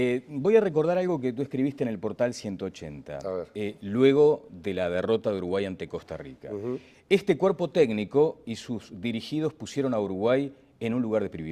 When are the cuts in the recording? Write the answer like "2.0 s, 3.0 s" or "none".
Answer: 1.0 s